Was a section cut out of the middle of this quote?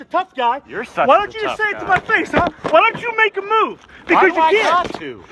no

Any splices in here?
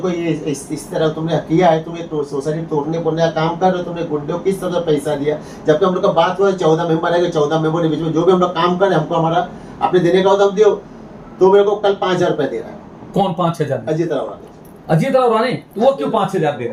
no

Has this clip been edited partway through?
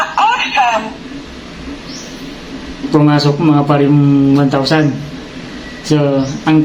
no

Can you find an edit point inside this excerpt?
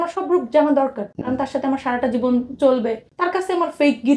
yes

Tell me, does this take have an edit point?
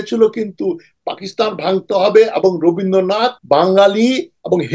yes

